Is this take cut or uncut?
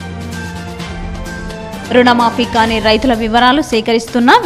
uncut